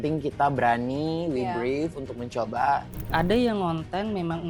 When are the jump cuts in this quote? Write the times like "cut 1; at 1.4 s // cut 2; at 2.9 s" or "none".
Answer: cut 1; at 3.0 s